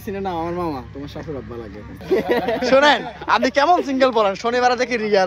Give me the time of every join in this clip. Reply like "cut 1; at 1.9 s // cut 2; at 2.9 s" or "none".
cut 1; at 2.0 s